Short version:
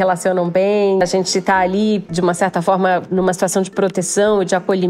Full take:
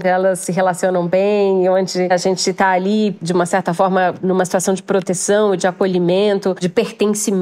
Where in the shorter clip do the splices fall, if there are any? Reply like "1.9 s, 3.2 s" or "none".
1.0 s